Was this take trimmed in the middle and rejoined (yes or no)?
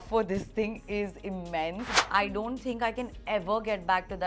yes